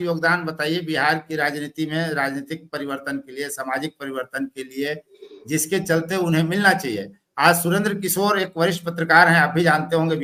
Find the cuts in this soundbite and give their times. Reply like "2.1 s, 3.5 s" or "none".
none